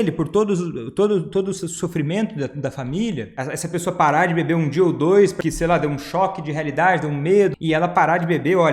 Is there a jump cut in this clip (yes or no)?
yes